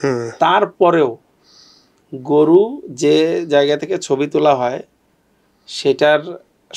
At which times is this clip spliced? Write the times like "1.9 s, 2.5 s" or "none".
none

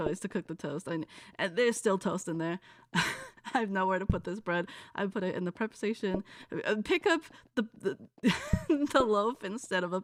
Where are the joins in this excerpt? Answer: none

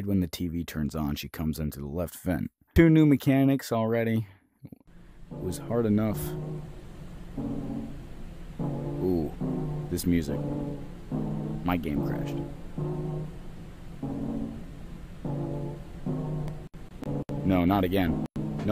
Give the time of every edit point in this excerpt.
2.6 s

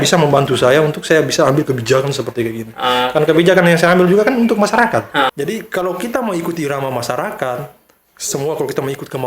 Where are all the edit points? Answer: 5.3 s

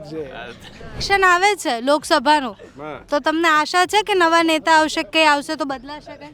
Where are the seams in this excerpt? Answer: 1.0 s

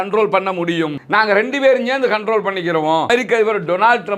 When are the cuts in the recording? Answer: 3.1 s

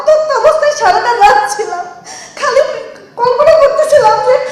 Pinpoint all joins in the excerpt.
none

